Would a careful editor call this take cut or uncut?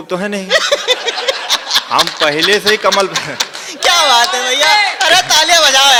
uncut